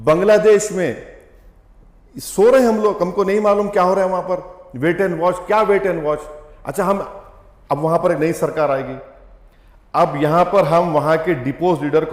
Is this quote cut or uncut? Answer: uncut